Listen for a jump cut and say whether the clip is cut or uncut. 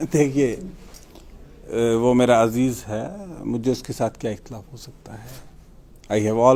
uncut